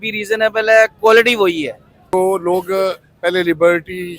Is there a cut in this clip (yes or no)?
yes